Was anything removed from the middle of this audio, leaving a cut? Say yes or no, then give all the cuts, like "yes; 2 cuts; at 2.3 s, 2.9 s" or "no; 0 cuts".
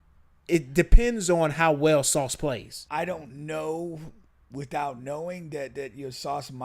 yes; 1 cut; at 2.7 s